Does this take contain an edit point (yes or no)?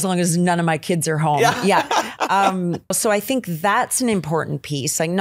yes